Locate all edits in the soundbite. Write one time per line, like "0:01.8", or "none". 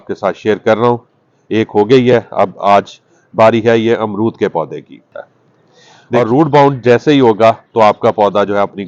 0:06.2